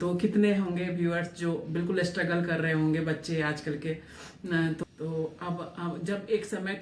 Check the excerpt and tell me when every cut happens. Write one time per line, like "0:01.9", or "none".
0:04.8